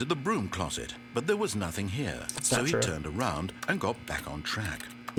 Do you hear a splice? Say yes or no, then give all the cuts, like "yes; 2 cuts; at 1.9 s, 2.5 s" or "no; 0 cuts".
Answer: no; 0 cuts